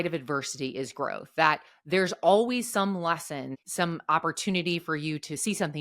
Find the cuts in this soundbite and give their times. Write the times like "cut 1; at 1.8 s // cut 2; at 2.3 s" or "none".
cut 1; at 3.5 s